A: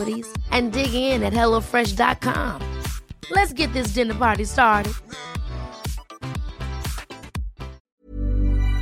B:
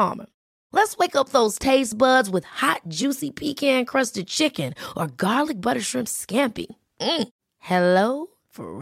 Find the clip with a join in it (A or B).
A